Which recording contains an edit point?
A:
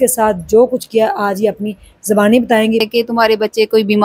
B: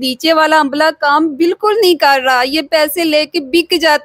A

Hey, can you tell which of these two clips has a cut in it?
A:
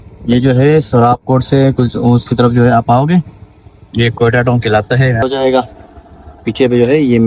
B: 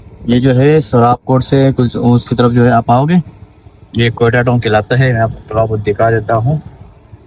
A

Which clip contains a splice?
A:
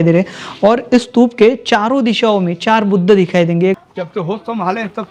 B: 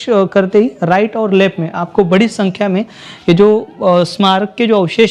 A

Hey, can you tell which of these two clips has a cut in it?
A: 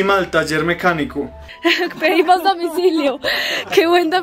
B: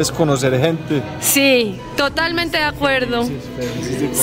A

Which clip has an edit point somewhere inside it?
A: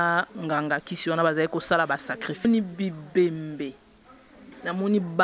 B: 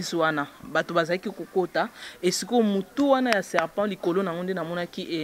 A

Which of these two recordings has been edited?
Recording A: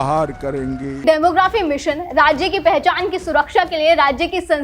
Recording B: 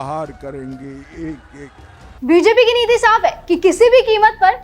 A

